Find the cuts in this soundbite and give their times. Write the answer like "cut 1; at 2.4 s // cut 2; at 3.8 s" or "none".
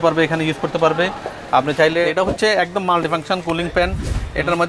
cut 1; at 2.0 s